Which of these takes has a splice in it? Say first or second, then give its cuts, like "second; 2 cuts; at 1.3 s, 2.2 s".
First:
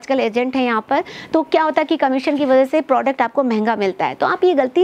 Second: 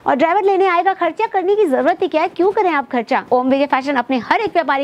second; 1 cut; at 3.3 s